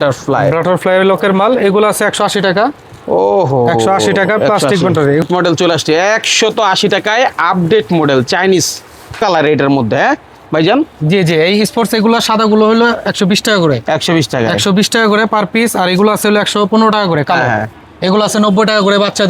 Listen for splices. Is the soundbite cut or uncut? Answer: cut